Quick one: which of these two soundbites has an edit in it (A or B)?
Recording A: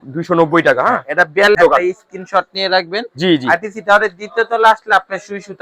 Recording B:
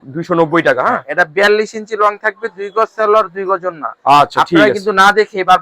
A